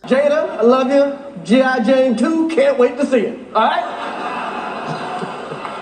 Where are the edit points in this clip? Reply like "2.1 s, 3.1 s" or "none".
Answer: none